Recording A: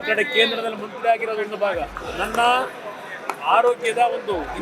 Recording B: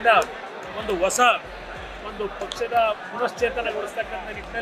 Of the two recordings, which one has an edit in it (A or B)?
A